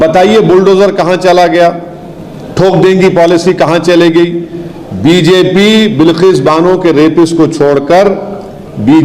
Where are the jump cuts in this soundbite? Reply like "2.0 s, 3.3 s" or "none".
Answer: none